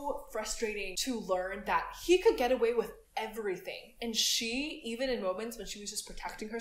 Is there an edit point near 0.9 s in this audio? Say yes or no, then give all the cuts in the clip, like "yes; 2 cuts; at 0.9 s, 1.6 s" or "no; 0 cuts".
yes; 1 cut; at 0.9 s